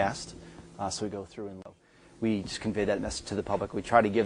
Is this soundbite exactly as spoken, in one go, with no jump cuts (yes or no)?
no